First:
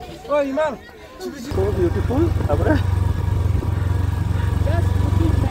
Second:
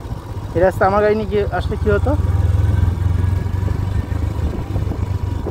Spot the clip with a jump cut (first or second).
first